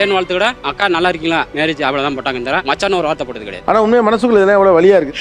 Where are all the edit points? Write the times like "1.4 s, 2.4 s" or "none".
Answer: none